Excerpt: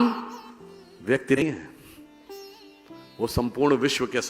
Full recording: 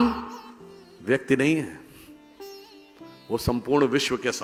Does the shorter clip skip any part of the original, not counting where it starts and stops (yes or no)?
yes